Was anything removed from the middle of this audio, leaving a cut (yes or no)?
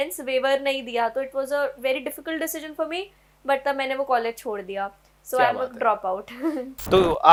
no